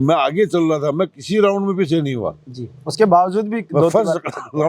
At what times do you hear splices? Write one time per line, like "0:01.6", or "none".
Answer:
none